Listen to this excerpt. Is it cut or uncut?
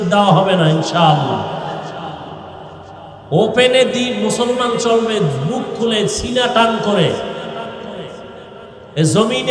cut